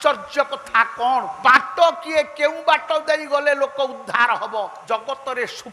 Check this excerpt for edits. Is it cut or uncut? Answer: cut